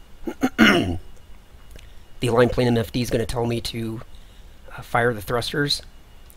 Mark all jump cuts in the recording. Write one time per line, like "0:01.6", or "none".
0:03.6